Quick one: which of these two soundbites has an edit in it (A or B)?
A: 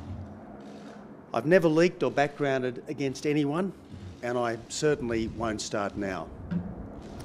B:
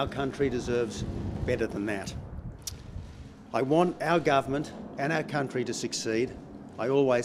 B